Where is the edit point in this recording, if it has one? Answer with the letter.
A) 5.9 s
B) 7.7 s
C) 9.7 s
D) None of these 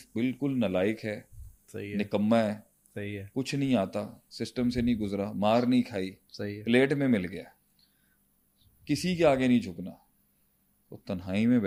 D